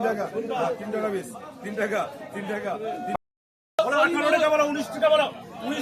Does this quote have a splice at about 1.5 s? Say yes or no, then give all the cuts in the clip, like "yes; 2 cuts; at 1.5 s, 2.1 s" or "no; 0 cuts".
no; 1 cut; at 3.2 s